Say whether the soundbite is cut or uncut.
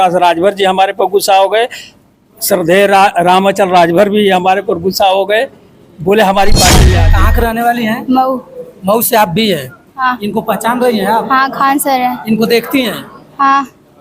cut